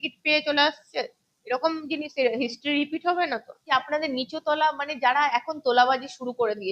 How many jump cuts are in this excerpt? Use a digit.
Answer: 1